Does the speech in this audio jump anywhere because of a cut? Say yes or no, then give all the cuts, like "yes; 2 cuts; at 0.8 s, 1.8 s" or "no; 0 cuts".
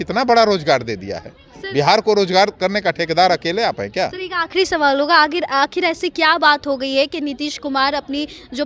no; 0 cuts